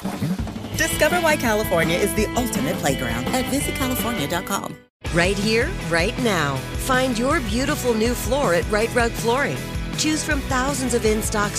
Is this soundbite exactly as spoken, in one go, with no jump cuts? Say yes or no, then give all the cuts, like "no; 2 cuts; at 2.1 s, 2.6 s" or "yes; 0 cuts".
no; 1 cut; at 4.8 s